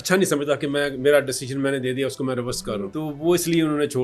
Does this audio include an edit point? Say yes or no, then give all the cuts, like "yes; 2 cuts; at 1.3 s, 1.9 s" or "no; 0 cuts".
yes; 1 cut; at 2.9 s